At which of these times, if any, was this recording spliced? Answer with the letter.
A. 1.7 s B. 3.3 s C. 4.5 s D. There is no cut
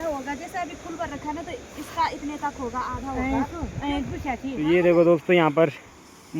C